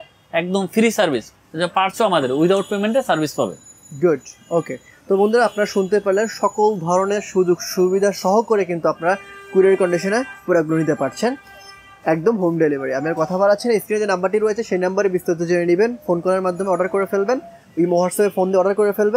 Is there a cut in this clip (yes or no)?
no